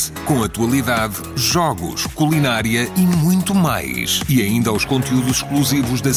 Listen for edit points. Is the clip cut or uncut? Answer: uncut